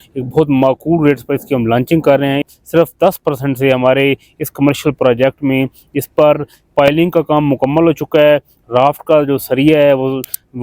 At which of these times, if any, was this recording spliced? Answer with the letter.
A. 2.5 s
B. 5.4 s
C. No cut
A